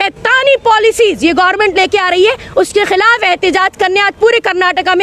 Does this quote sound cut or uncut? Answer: uncut